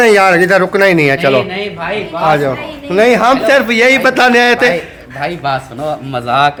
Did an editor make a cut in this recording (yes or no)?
no